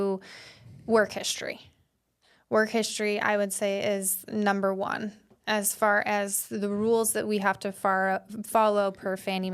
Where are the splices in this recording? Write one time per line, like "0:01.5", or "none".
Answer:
none